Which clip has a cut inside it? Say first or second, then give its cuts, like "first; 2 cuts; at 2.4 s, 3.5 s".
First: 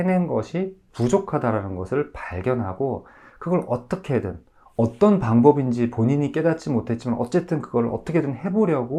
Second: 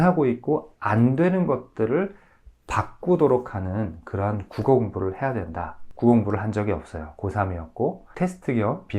second; 2 cuts; at 5.8 s, 8.1 s